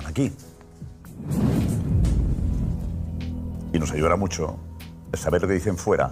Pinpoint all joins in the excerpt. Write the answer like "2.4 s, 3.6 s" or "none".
2.4 s